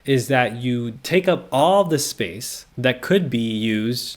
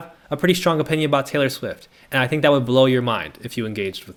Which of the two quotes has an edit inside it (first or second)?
first